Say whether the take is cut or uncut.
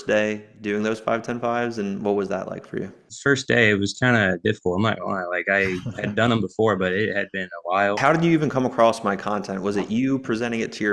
cut